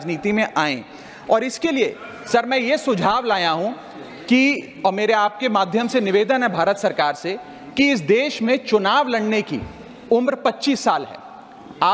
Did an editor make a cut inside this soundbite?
no; 0 cuts

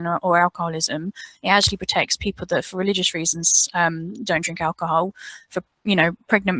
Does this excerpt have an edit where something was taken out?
no; 0 cuts

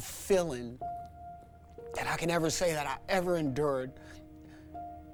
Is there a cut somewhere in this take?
no; 0 cuts

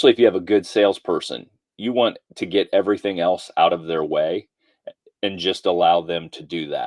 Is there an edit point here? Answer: no; 0 cuts

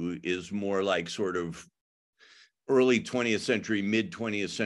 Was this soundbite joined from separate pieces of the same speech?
no; 0 cuts

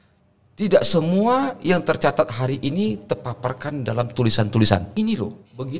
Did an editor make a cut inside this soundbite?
yes; 1 cut; at 4.9 s

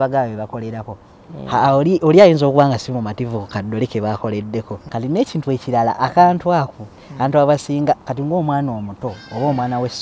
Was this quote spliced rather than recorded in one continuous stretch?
yes; 1 cut; at 4.8 s

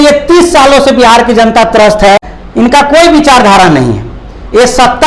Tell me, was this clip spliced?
yes; 1 cut; at 2.3 s

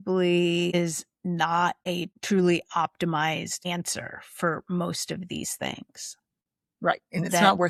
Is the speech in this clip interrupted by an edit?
no; 0 cuts

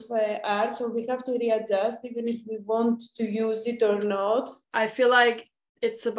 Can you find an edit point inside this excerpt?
no; 0 cuts

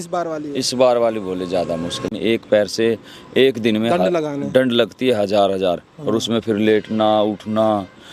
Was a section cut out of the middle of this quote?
yes; 1 cut; at 2.1 s

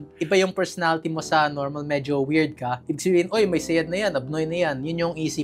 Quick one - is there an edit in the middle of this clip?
no; 0 cuts

